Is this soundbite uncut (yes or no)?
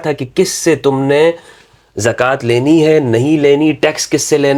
yes